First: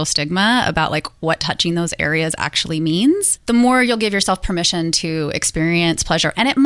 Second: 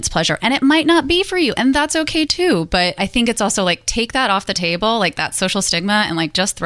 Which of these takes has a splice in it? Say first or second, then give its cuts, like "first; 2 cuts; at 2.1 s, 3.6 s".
first; 1 cut; at 3.3 s